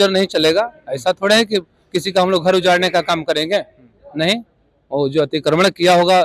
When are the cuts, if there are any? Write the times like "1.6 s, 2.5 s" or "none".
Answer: none